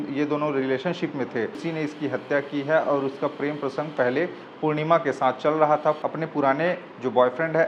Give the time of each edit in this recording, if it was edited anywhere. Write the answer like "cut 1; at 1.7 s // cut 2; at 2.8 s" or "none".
cut 1; at 1.6 s // cut 2; at 6.0 s